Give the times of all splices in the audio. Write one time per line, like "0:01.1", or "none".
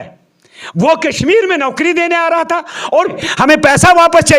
0:03.2